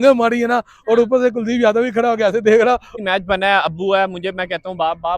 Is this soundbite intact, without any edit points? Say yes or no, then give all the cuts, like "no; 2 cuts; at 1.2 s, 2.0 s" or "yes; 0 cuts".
no; 1 cut; at 2.9 s